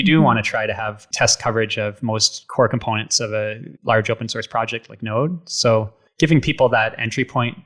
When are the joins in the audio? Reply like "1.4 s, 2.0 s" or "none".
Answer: 1.0 s, 2.4 s, 3.7 s, 6.0 s